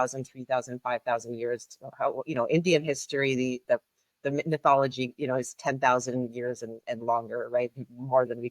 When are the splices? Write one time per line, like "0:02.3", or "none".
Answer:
none